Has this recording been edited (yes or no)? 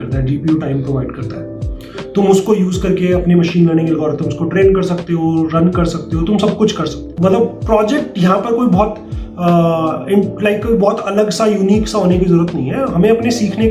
yes